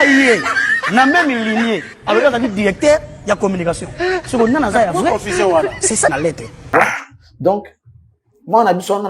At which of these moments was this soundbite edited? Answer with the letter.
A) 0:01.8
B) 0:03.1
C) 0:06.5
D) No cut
C